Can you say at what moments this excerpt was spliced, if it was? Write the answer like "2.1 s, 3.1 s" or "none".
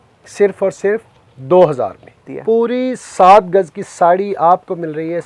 2.3 s